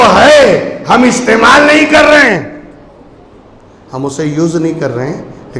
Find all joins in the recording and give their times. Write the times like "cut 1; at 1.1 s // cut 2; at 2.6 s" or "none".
none